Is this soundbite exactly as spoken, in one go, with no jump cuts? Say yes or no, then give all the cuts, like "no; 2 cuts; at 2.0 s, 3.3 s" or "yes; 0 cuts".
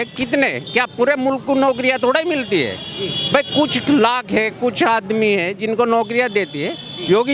yes; 0 cuts